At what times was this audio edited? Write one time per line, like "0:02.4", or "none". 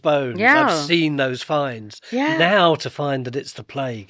0:02.0

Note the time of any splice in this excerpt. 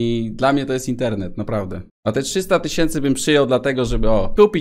none

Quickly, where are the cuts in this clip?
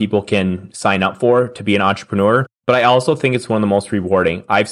0:02.5

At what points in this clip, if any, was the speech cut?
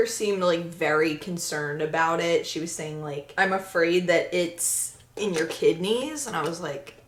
none

